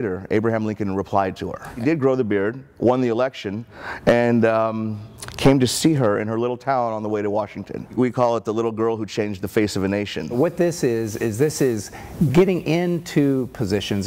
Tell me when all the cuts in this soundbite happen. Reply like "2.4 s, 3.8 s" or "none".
1.7 s, 7.9 s, 10.4 s